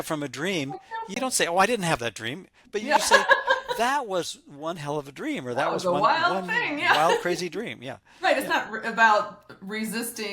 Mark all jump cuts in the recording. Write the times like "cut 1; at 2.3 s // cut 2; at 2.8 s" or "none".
cut 1; at 1.1 s